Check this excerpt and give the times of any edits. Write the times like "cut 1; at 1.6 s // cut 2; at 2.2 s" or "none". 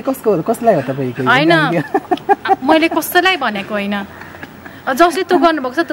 none